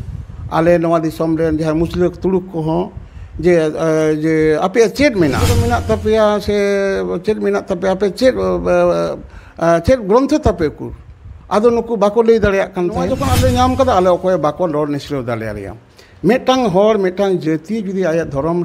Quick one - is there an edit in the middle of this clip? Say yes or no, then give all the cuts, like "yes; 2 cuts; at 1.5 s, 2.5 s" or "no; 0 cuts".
yes; 2 cuts; at 5.6 s, 13.2 s